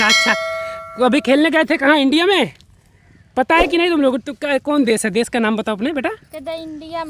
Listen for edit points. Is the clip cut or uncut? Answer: uncut